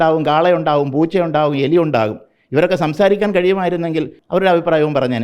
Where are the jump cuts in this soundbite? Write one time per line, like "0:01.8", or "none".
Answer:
0:04.2